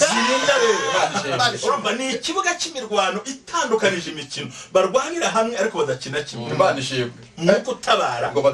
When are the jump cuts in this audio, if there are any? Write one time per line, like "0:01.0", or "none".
none